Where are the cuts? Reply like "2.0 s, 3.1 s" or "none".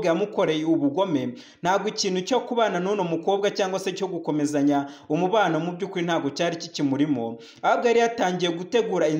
none